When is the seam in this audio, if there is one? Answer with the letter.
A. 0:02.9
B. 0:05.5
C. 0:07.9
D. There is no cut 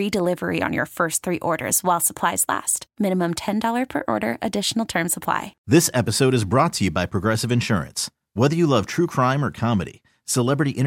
B